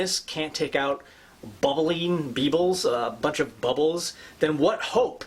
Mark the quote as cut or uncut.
uncut